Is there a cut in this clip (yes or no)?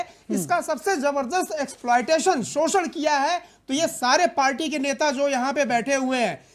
no